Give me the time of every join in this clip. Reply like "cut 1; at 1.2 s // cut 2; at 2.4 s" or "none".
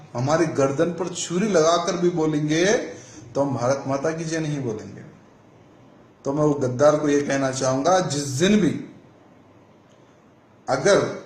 cut 1; at 8.2 s

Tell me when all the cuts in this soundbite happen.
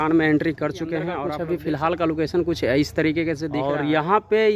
cut 1; at 1.2 s // cut 2; at 3.5 s

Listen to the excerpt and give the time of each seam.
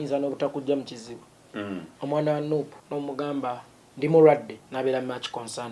cut 1; at 1.5 s // cut 2; at 2.8 s // cut 3; at 4.6 s

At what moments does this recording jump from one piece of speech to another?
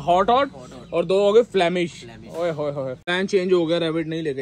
cut 1; at 3.0 s

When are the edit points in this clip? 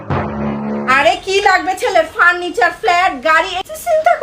cut 1; at 0.9 s

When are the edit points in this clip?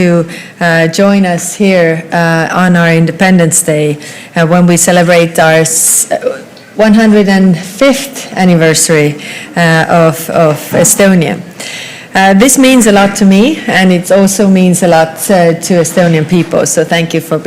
cut 1; at 0.9 s

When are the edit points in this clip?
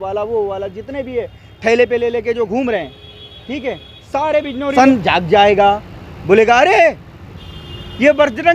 cut 1; at 4.7 s

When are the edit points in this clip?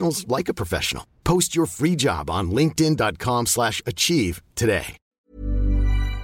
cut 1; at 5.1 s

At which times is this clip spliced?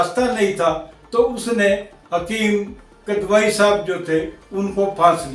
none

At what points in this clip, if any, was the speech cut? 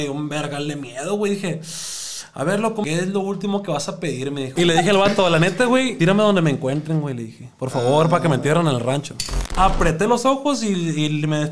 cut 1; at 2.8 s // cut 2; at 4.5 s // cut 3; at 5.9 s // cut 4; at 9.4 s

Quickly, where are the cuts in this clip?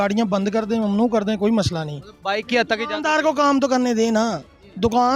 none

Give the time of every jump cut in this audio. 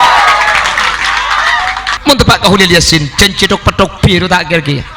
cut 1; at 1.9 s

